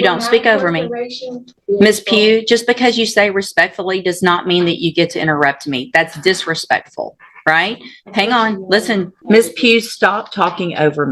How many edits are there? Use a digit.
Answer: 2